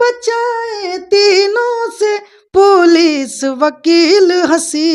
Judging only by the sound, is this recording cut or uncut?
uncut